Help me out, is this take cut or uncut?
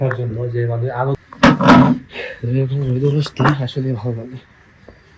cut